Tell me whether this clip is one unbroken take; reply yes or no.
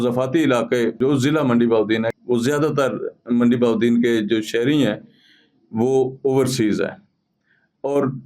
no